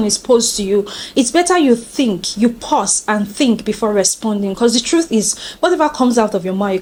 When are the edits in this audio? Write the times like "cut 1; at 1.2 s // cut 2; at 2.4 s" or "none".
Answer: none